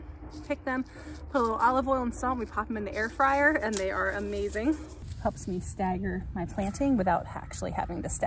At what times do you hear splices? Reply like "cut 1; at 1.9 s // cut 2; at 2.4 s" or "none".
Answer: cut 1; at 5.0 s